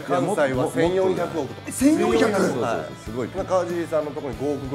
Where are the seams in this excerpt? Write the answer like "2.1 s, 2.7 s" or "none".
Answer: 3.3 s